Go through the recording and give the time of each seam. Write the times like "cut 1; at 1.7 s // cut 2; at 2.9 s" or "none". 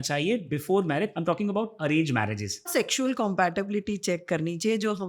cut 1; at 1.2 s // cut 2; at 2.7 s